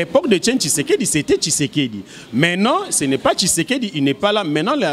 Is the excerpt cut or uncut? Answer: uncut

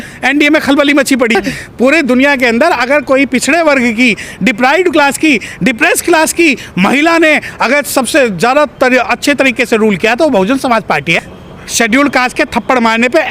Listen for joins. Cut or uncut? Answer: cut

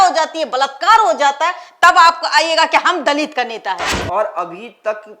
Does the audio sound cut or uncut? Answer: cut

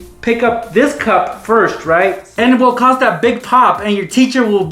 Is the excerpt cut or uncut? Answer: cut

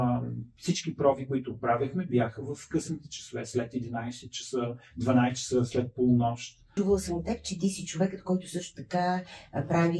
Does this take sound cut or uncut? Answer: cut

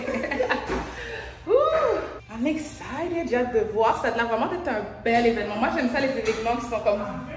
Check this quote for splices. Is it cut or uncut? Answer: cut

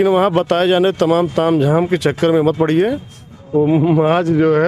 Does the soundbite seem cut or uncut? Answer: uncut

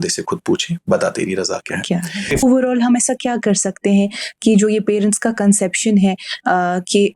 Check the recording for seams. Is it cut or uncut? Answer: cut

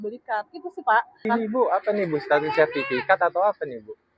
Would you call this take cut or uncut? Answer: cut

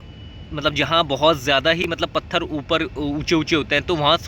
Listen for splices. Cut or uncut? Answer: uncut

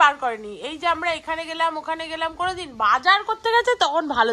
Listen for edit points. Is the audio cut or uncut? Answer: uncut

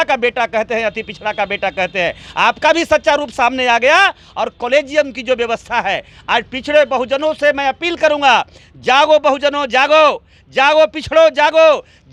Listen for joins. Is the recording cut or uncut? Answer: uncut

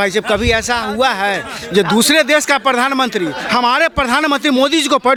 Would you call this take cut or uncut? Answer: uncut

